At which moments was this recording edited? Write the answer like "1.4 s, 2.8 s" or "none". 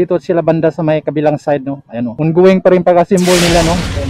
2.1 s